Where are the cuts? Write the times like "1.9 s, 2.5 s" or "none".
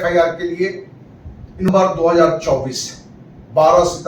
1.7 s

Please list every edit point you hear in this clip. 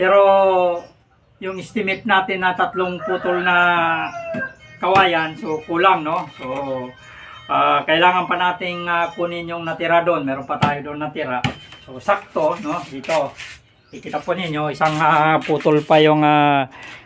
none

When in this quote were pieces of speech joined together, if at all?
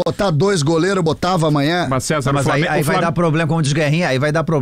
none

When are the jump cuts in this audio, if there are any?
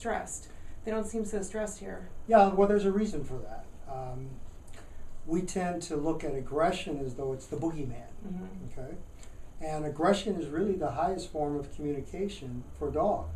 none

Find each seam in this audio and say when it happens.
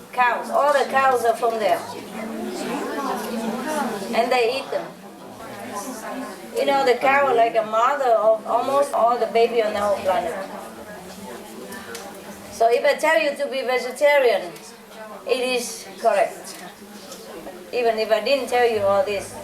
5.4 s

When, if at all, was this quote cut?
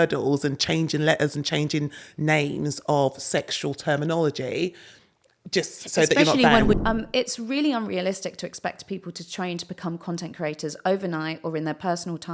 6.8 s

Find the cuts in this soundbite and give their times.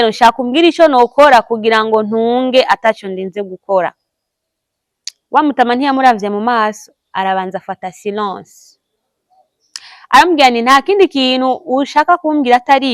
none

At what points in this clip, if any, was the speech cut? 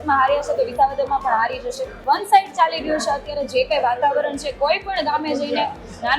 1.9 s

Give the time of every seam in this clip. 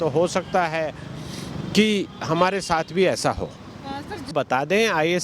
4.3 s

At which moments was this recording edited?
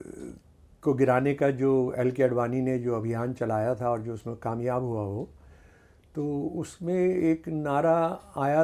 none

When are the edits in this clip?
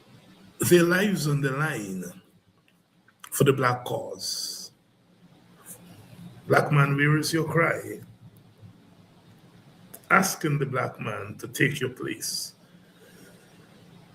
5.0 s

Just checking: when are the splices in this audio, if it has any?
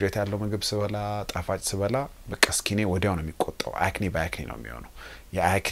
none

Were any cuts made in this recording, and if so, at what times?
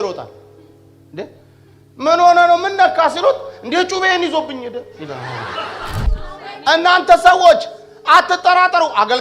6.0 s

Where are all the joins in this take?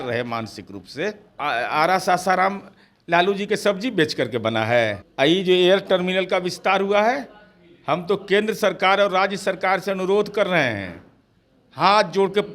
1.3 s, 5.0 s

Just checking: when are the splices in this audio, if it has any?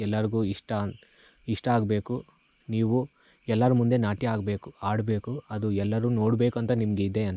none

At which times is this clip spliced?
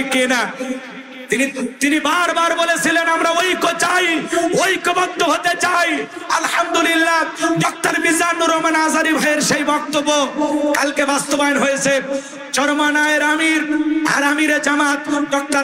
none

